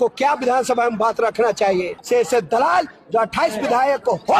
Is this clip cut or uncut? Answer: cut